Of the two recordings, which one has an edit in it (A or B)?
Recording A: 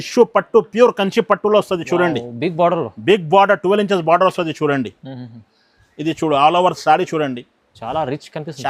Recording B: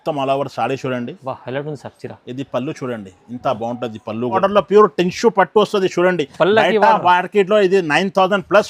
B